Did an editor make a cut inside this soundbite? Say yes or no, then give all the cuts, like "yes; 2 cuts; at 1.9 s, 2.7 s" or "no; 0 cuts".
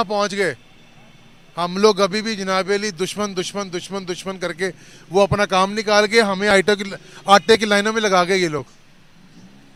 no; 0 cuts